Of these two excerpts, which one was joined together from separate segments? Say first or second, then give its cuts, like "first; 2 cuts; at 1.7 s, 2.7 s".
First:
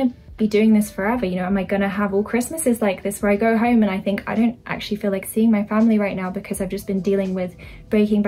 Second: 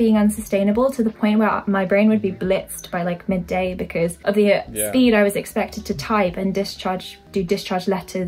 second; 2 cuts; at 4.2 s, 7.2 s